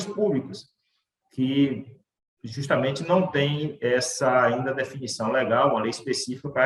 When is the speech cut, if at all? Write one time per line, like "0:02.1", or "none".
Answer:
none